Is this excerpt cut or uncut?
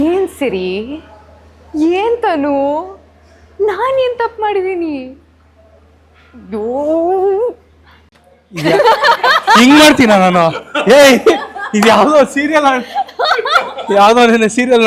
uncut